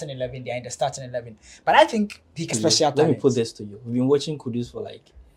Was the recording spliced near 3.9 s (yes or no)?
no